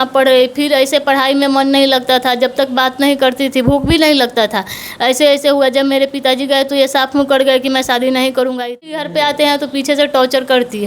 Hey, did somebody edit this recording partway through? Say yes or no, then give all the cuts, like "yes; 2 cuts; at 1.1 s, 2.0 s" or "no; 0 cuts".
yes; 1 cut; at 9.0 s